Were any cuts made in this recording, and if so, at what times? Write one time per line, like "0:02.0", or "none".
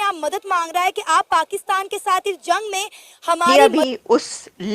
0:03.5